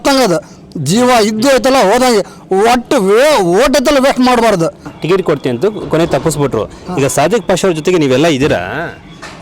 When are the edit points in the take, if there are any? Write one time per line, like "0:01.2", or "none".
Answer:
0:04.9